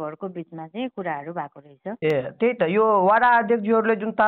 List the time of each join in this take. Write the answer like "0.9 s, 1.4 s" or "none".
none